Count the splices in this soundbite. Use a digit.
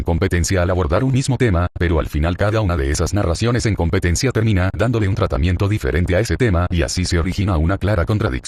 1